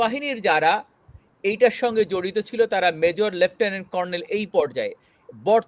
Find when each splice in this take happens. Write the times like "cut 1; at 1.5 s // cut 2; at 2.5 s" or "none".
none